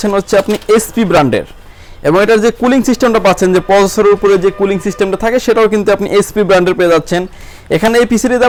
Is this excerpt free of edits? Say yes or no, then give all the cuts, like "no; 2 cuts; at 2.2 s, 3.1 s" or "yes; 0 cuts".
yes; 0 cuts